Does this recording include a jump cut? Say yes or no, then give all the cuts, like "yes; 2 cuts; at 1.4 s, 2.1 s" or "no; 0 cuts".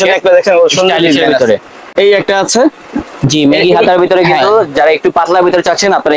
yes; 1 cut; at 1.8 s